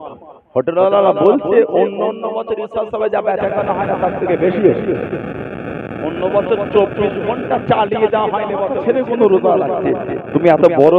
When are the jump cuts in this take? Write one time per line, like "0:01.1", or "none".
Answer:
0:08.7